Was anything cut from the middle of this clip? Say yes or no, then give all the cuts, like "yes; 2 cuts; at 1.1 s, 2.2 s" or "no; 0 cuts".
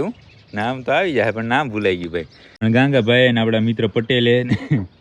yes; 1 cut; at 2.4 s